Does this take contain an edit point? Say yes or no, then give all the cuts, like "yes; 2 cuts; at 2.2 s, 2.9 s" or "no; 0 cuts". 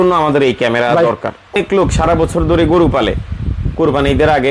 yes; 1 cut; at 1.5 s